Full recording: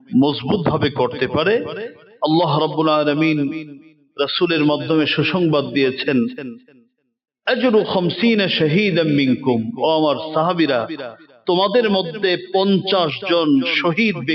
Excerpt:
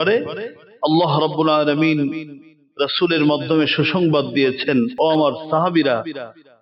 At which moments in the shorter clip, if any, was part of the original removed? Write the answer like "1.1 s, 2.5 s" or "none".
4.9 s